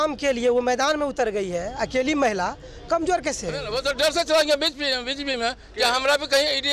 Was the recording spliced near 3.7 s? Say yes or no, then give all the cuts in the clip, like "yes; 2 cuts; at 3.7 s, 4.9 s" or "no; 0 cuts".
yes; 1 cut; at 3.7 s